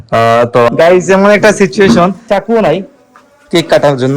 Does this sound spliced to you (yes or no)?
yes